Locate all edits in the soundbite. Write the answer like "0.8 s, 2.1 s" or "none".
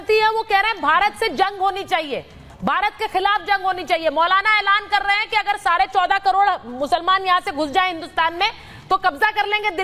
none